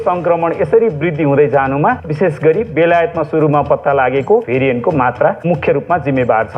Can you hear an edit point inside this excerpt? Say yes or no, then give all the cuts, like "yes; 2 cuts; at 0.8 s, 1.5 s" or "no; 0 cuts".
yes; 2 cuts; at 2.1 s, 4.5 s